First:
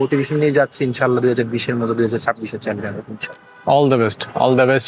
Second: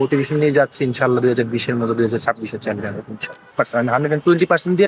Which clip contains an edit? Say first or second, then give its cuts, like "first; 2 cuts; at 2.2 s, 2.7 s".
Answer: second; 1 cut; at 3.5 s